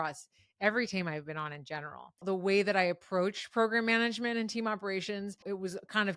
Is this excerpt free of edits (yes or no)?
no